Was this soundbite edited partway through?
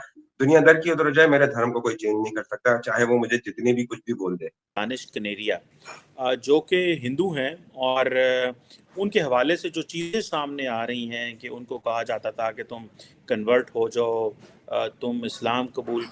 yes; 1 cut; at 4.7 s

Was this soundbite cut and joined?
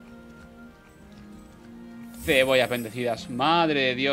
no; 0 cuts

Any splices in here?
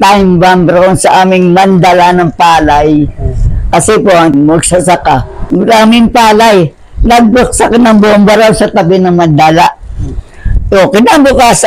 yes; 1 cut; at 4.3 s

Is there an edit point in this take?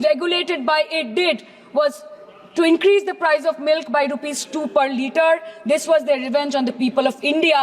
no; 0 cuts

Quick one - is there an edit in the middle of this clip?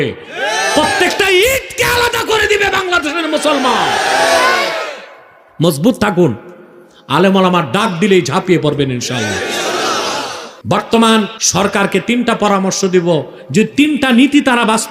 yes; 2 cuts; at 10.5 s, 11.4 s

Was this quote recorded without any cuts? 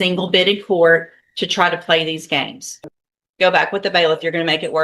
no; 1 cut; at 2.6 s

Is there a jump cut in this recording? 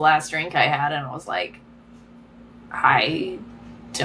no; 0 cuts

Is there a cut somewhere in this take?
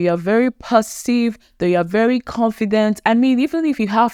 no; 0 cuts

